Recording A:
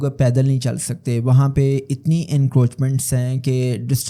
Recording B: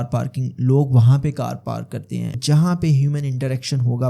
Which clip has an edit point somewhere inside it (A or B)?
B